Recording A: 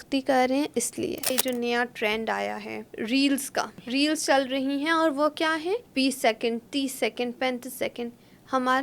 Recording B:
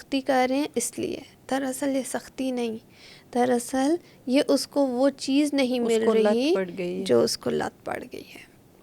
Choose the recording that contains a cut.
A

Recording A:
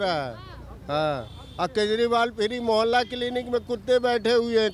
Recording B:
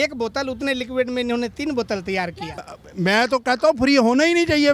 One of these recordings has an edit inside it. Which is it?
B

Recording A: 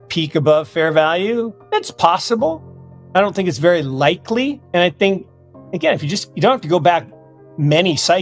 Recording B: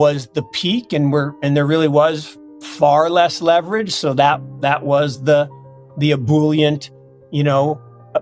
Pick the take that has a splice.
A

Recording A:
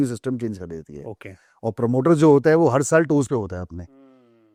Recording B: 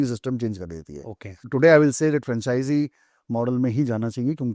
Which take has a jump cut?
B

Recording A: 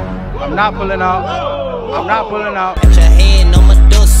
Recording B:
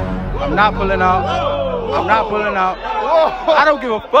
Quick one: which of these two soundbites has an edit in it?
B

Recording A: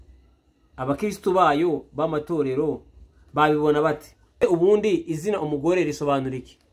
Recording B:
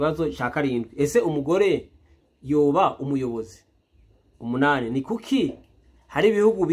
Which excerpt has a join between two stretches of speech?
A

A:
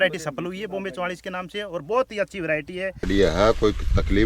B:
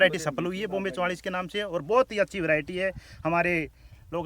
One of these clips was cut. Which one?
A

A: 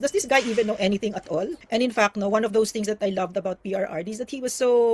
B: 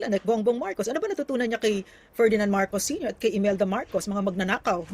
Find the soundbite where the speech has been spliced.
A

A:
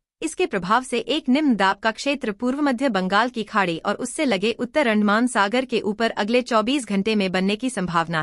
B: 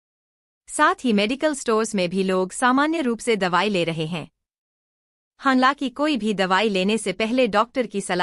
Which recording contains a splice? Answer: A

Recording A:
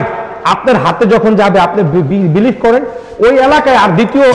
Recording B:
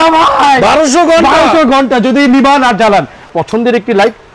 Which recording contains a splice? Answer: B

